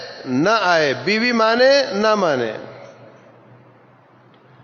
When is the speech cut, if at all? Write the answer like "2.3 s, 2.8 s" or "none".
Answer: none

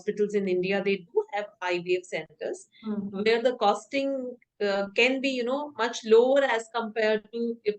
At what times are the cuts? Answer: none

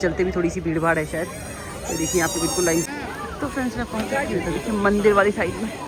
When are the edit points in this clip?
2.9 s

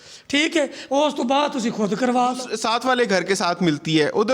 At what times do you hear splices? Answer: 2.5 s

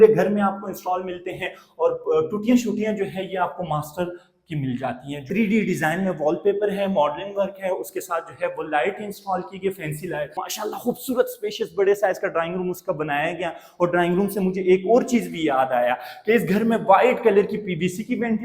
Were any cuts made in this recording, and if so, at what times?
5.3 s, 10.4 s

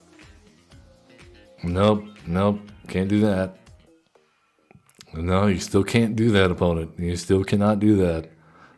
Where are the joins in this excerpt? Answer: 3.8 s

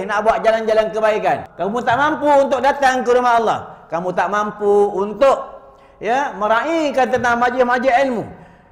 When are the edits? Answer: 1.5 s

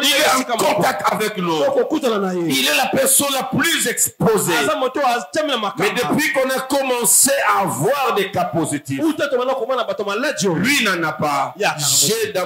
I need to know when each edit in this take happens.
none

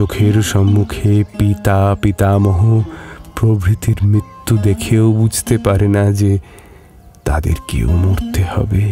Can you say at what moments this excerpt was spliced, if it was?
none

